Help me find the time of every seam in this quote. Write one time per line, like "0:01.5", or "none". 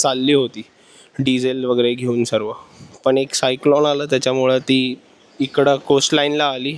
none